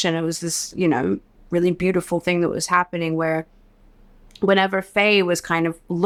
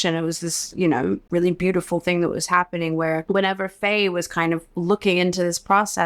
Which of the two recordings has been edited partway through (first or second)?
second